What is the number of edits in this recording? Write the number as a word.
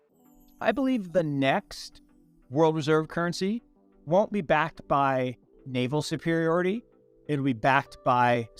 zero